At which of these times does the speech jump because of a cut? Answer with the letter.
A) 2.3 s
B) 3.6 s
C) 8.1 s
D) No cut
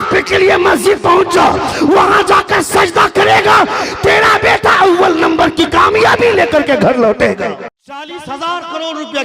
C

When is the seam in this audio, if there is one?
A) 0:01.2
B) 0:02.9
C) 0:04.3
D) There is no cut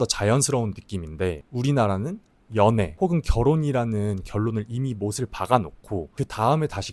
B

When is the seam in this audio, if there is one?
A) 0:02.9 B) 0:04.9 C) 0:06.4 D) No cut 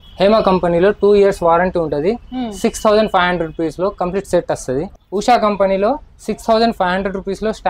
B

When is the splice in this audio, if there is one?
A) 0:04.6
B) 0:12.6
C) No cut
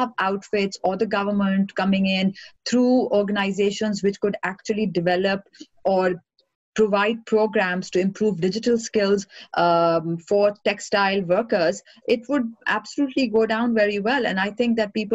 C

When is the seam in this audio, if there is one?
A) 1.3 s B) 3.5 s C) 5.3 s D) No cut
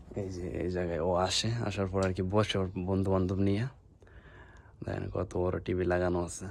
D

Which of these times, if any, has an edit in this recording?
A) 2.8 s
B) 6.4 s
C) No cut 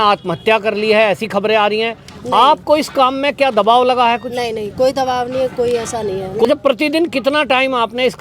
B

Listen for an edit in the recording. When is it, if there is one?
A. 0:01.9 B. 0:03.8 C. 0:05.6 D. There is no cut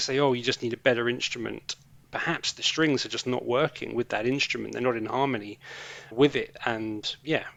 D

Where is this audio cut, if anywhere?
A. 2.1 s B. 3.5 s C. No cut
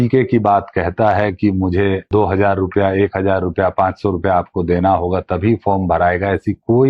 A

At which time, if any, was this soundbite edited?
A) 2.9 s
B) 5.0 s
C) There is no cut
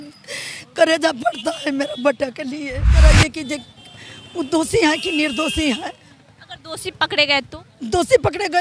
A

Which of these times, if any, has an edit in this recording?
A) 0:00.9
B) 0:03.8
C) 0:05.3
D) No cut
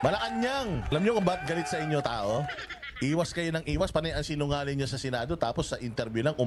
A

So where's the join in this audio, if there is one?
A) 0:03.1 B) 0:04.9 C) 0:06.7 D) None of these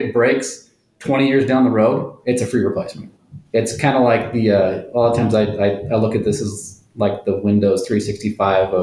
A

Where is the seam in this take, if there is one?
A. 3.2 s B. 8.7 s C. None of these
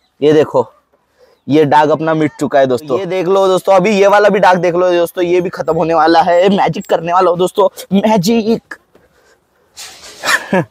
A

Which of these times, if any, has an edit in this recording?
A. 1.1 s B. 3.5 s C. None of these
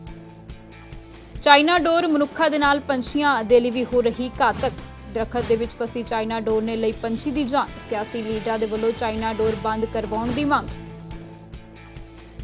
A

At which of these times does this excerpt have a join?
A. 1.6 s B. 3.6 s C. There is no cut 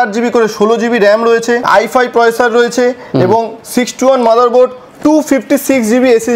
A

